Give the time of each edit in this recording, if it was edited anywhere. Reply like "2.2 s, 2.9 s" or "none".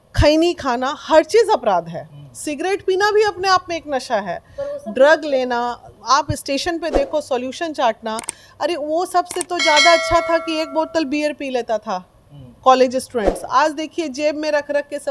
none